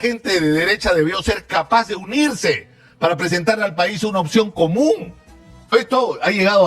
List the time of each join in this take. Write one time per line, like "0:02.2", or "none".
0:05.7